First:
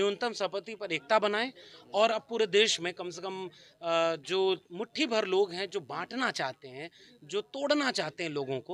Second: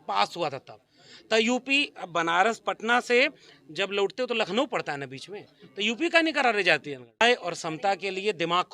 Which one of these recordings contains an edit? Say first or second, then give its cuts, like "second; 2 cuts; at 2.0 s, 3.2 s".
second; 1 cut; at 7.2 s